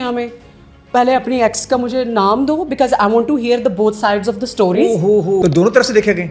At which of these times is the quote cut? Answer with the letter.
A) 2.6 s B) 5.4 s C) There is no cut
B